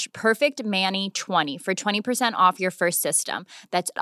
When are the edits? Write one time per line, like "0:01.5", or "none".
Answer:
0:01.5